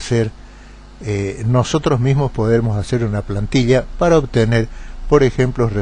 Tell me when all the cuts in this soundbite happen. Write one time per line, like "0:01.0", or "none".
0:01.8

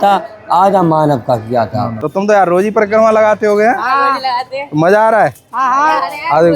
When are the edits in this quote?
0:01.8

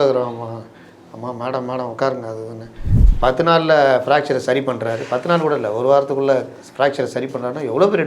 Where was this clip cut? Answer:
0:03.0

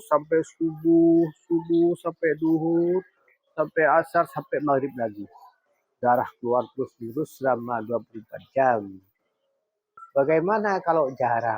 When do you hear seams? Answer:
0:10.0

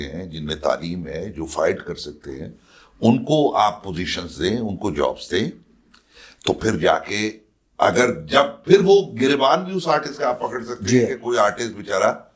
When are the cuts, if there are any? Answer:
none

